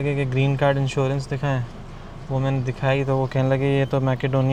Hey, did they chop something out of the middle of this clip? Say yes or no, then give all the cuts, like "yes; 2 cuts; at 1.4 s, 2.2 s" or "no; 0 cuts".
no; 0 cuts